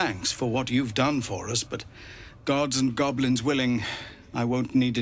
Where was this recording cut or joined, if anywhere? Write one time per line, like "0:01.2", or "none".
none

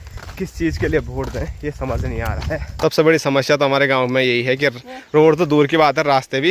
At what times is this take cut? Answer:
0:02.7

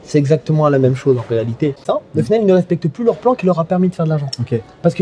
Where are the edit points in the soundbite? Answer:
0:01.8

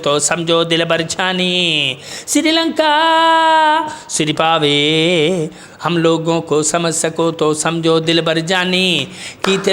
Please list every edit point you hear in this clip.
none

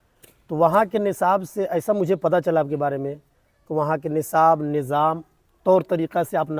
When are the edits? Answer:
none

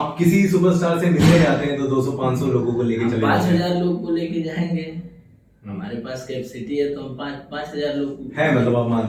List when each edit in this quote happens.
none

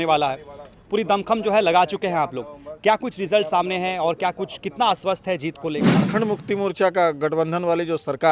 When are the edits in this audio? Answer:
0:05.9

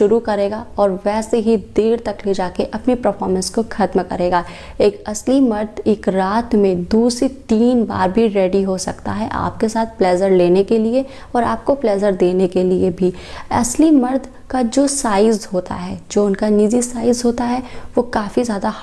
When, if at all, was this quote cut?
none

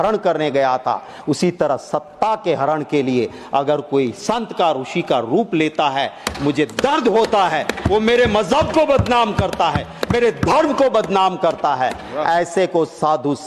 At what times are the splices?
none

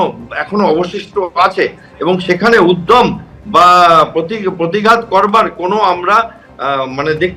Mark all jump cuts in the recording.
none

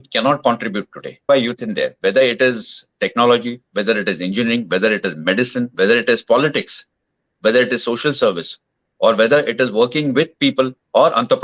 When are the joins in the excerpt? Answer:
0:01.3

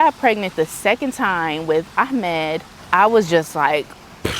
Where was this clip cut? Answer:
0:02.7

